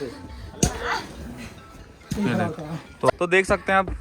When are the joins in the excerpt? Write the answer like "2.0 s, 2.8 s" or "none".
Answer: 3.1 s